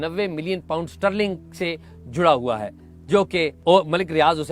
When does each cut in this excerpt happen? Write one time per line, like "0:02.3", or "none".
0:03.5